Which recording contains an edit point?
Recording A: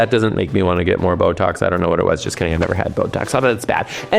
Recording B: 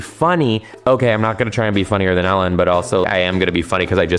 B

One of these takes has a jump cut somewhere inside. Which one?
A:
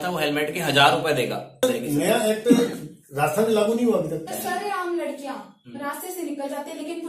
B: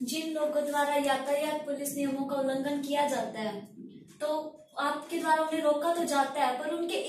A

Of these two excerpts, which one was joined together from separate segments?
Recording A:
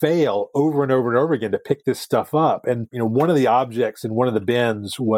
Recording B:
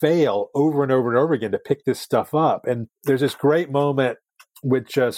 A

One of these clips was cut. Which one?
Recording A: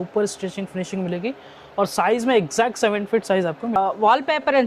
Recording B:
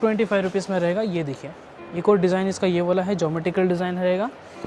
A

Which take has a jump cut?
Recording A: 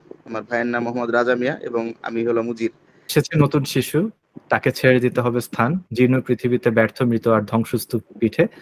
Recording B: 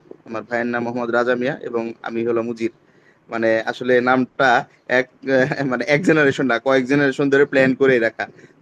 A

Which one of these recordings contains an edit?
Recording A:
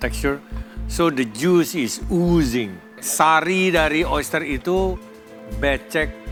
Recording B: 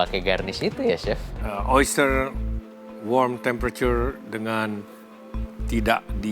B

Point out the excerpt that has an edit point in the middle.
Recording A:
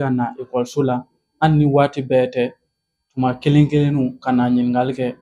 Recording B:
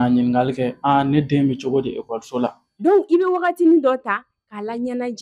B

